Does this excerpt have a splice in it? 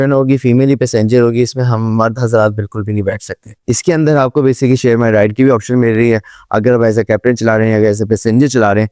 yes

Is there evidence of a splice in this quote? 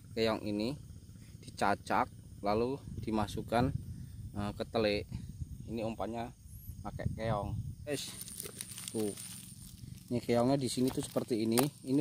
yes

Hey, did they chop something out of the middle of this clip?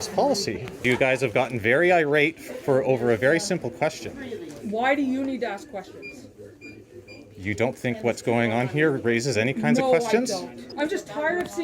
yes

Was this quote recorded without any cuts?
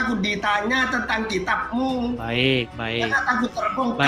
yes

